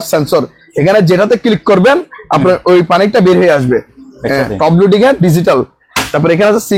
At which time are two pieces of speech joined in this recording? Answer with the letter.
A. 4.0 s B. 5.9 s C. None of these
A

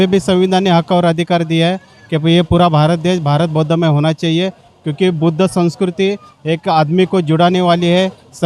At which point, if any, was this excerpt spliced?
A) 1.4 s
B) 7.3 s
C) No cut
C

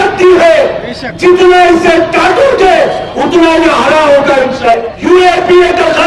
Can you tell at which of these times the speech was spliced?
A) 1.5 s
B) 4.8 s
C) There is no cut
B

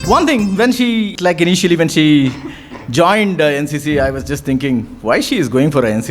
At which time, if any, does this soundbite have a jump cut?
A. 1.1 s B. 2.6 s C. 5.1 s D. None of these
A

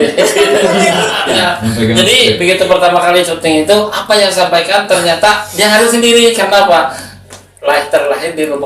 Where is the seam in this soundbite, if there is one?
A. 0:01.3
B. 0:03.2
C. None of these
A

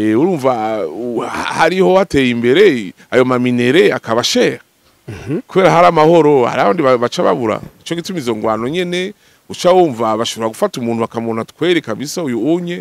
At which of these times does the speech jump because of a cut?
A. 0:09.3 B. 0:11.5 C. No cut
C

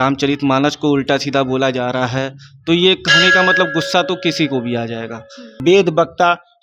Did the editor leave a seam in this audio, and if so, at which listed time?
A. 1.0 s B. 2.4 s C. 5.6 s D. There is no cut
C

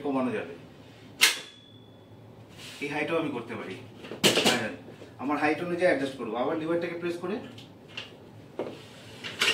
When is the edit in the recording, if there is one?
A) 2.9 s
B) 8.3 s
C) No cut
B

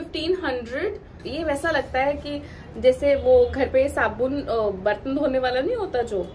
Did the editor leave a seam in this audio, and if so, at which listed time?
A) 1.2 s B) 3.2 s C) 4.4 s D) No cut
A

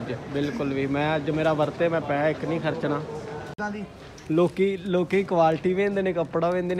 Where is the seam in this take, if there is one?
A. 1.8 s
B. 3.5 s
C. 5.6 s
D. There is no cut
B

